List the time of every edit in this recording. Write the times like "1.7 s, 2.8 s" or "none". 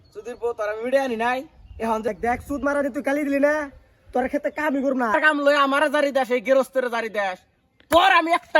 2.1 s, 5.2 s